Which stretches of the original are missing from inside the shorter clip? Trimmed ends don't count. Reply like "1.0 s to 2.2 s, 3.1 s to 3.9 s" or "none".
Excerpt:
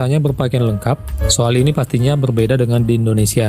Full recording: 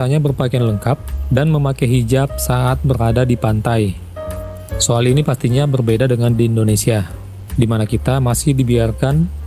1.1 s to 4.6 s